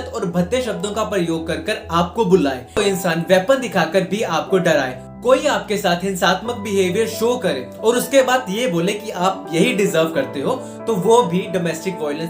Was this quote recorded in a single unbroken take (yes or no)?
no